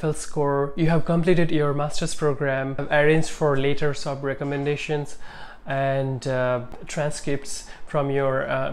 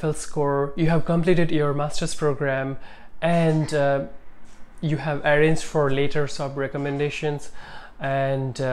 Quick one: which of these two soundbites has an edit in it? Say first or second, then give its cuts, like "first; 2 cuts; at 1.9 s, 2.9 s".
first; 2 cuts; at 2.8 s, 6.8 s